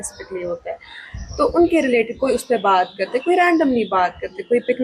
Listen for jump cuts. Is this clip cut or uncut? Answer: uncut